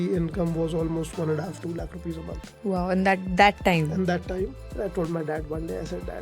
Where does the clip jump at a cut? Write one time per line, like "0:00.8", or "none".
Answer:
0:04.8